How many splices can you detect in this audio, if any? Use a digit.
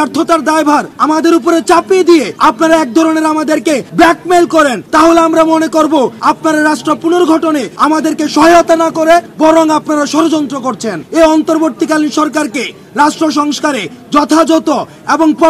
8